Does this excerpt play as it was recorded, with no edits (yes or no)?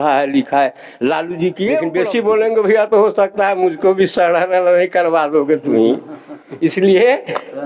yes